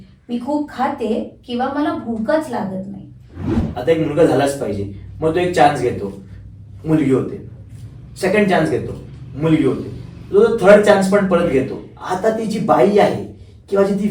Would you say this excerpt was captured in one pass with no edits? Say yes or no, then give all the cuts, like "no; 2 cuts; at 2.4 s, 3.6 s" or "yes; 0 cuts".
no; 1 cut; at 3.5 s